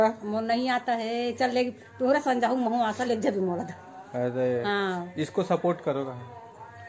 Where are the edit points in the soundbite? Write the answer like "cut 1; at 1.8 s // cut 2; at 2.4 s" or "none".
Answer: none